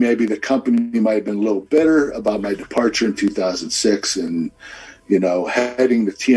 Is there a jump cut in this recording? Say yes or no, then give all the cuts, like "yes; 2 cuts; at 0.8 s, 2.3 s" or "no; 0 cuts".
no; 0 cuts